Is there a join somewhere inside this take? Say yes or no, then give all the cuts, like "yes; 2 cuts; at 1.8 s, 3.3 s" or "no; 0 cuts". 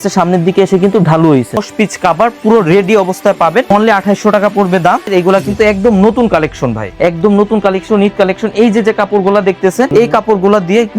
yes; 5 cuts; at 1.6 s, 3.7 s, 5.1 s, 6.9 s, 9.9 s